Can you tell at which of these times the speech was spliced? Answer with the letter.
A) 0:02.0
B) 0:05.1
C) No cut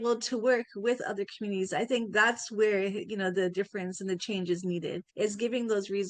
B